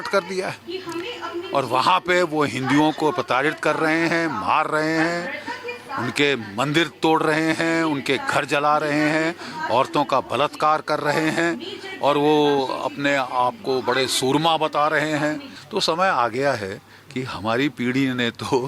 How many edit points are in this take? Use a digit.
1